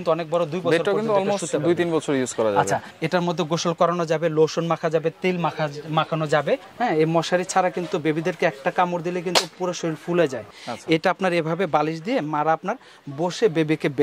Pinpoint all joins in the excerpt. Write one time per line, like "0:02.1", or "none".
0:02.9
0:06.7
0:10.5